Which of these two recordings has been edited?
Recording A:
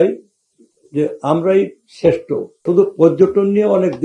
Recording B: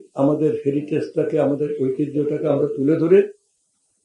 A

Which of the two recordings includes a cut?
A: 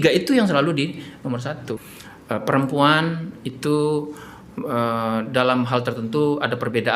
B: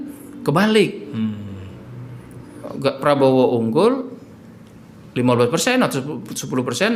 A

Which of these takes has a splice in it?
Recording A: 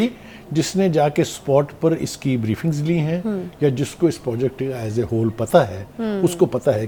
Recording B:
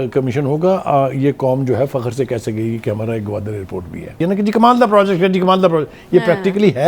B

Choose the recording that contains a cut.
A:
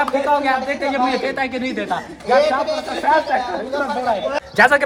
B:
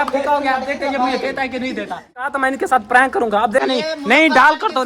B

